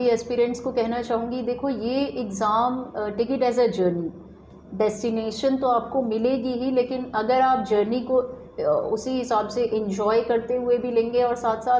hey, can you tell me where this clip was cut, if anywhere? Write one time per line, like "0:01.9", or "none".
none